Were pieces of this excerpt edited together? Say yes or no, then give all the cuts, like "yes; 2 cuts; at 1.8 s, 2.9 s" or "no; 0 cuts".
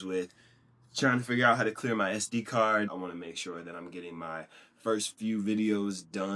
yes; 1 cut; at 2.9 s